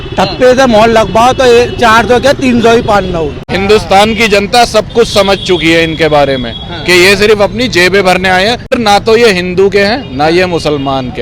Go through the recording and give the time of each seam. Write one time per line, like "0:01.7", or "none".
0:03.4
0:08.7

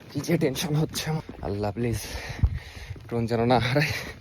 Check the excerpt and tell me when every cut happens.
0:01.3

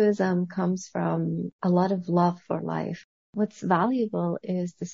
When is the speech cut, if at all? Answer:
0:01.5
0:03.1

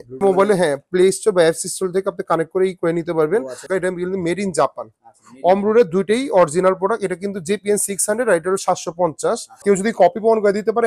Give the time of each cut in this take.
0:03.7
0:09.6

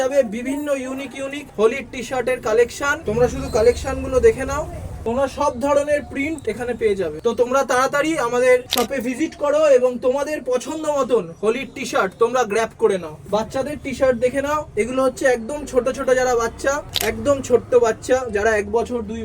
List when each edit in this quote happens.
0:03.0

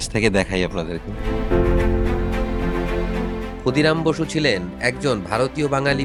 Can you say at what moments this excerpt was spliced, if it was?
none

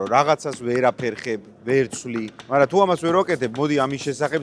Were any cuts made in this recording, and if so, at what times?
0:02.4

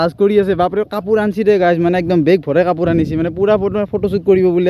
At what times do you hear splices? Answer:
none

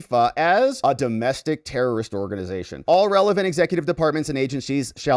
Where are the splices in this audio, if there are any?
none

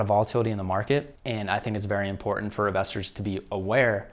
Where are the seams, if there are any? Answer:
none

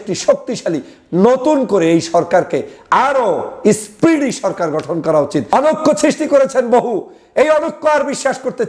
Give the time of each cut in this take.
0:05.5

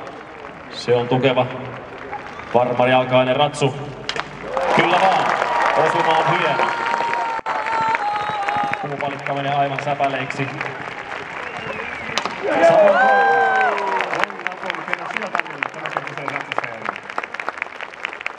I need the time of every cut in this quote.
none

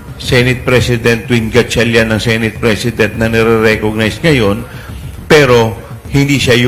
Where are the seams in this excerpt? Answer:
none

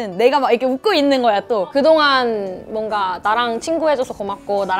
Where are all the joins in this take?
0:01.7

